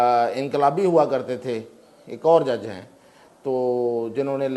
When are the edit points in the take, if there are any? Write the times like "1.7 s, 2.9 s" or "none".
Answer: none